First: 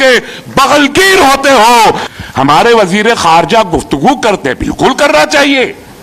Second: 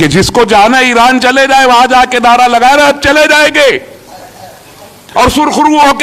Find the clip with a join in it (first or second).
first